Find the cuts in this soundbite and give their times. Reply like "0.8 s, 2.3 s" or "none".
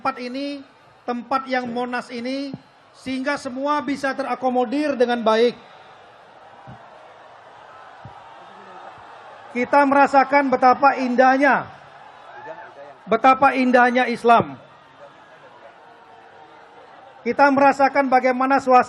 1.7 s